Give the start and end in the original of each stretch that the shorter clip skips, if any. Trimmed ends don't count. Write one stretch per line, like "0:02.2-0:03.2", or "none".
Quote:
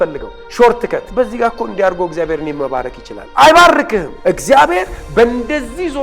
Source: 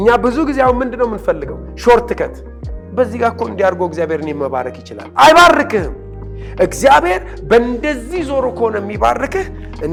0:02.3-0:02.9
0:05.9-0:06.4